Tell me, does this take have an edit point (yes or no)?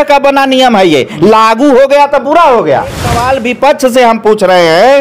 yes